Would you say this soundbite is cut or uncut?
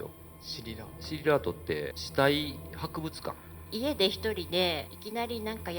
cut